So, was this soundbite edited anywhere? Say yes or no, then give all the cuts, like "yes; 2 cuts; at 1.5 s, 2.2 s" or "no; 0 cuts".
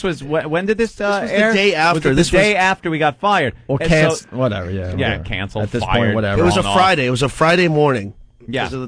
yes; 1 cut; at 5.7 s